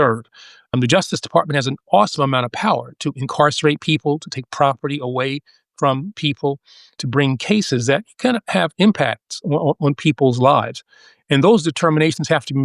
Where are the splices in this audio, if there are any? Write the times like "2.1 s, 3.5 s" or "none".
none

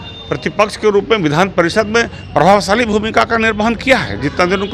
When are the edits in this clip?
none

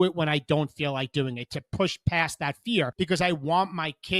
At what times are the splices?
2.9 s

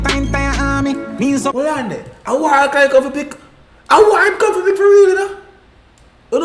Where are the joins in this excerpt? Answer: 1.5 s

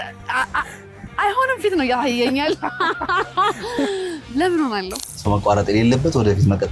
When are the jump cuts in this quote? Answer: 5.0 s

